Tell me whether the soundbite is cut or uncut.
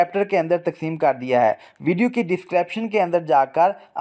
uncut